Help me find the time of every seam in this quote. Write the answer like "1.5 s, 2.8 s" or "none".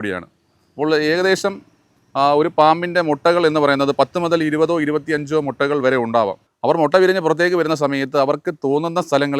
6.5 s